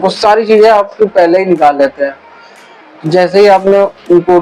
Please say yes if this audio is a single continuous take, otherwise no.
yes